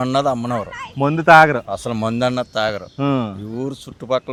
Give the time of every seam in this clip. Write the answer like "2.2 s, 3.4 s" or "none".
none